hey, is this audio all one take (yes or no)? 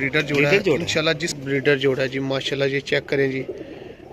yes